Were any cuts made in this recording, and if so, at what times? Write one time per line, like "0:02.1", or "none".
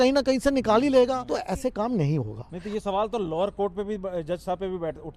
0:01.3